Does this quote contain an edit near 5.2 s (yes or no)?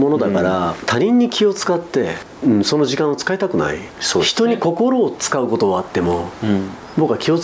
no